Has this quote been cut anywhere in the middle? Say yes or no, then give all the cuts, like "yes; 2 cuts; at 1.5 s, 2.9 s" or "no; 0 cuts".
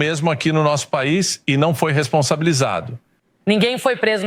yes; 1 cut; at 3.3 s